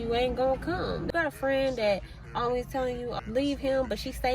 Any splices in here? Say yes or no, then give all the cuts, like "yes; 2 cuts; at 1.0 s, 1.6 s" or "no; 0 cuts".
yes; 2 cuts; at 1.1 s, 3.1 s